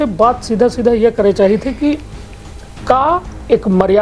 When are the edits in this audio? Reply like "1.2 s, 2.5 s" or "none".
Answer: none